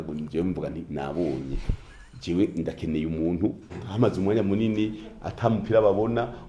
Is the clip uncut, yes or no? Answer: no